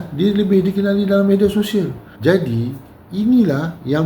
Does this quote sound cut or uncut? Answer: cut